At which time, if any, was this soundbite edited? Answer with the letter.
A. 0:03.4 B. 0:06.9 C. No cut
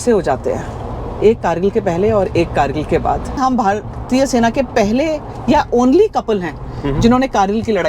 A